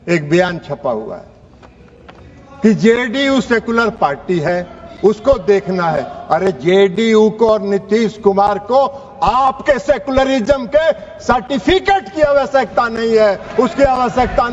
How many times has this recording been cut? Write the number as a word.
zero